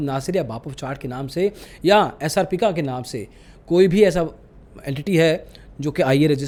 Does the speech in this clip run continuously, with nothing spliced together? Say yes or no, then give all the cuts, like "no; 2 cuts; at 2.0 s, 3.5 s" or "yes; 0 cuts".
yes; 0 cuts